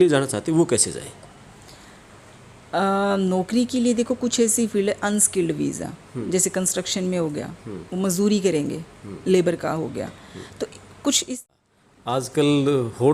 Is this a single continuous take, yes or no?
no